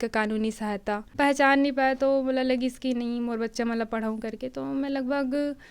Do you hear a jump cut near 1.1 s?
yes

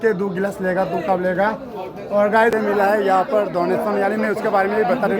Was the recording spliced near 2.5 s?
yes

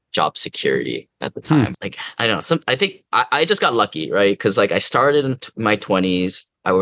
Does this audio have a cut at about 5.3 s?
no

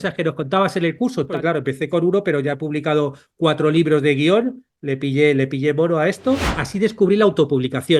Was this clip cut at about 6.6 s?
yes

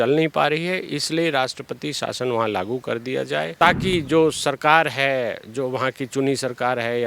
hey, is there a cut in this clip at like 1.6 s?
no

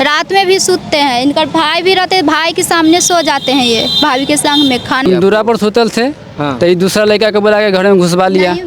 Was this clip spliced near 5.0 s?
yes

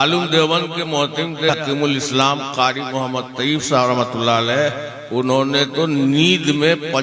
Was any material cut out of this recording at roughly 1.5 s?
yes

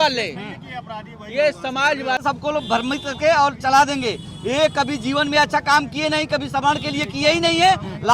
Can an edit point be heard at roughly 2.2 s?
yes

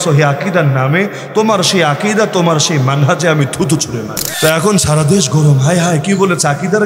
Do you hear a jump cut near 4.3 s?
yes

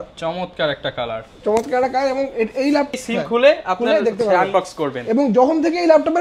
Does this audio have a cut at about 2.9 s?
yes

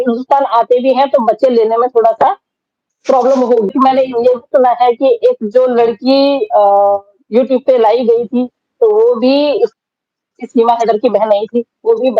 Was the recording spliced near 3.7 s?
yes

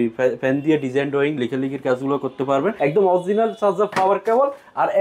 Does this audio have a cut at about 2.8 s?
yes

